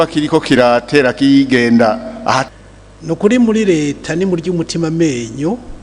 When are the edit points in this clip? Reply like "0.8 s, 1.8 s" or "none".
2.5 s